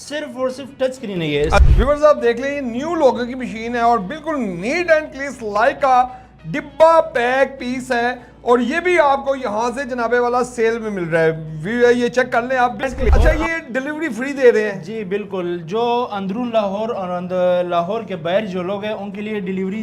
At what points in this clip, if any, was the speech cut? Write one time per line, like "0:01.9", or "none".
0:01.6
0:13.0